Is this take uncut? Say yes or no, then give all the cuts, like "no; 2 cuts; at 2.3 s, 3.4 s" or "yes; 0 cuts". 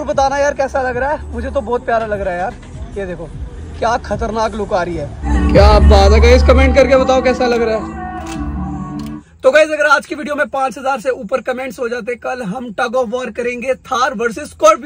no; 2 cuts; at 5.3 s, 9.2 s